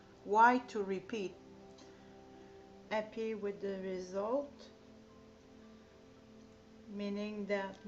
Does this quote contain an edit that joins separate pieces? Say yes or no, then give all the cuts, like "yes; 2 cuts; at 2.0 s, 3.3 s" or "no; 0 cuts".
no; 0 cuts